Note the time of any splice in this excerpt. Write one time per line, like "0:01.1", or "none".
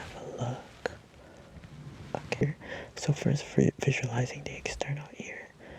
0:02.4